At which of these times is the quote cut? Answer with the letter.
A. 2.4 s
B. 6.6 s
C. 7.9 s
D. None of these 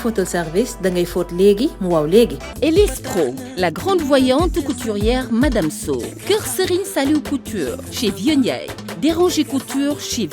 A